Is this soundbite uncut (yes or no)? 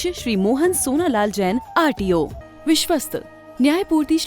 no